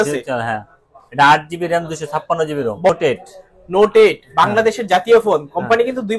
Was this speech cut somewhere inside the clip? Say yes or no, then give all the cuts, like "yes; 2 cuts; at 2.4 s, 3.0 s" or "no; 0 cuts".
yes; 1 cut; at 2.9 s